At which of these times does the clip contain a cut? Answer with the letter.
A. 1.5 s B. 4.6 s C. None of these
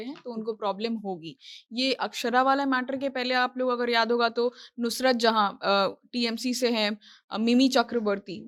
C